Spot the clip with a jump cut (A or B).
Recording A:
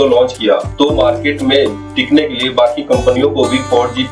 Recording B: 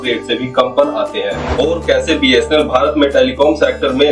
B